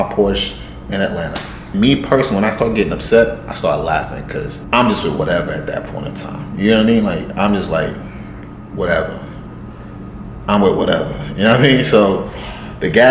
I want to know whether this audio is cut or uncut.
cut